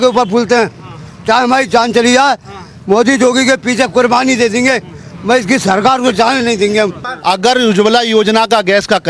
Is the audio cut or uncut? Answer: cut